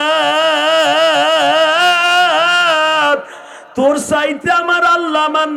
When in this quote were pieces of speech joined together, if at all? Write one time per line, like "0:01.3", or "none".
none

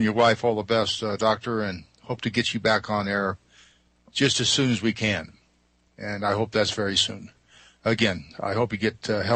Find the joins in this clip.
0:07.2

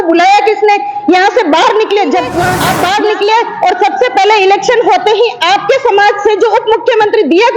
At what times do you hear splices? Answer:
0:02.6

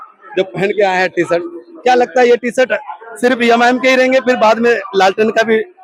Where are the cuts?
none

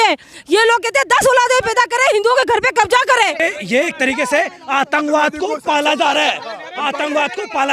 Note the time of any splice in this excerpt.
0:03.4

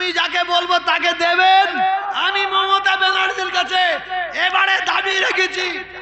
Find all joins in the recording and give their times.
0:02.1

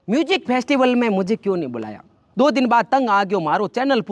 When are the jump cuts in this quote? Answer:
0:02.2

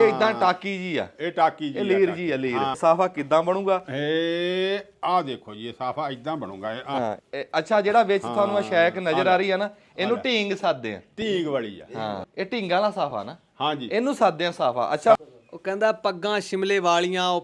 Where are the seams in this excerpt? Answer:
0:02.7
0:07.2
0:12.2
0:15.2

